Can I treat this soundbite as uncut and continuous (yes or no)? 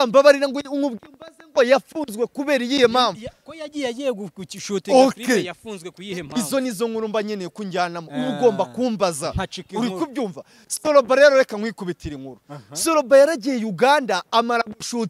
yes